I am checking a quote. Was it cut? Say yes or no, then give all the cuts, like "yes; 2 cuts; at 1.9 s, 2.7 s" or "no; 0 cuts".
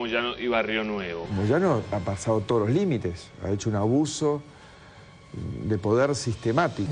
yes; 1 cut; at 1.2 s